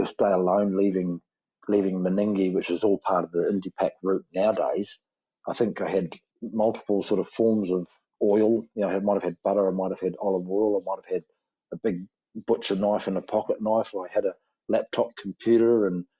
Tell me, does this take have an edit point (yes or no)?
no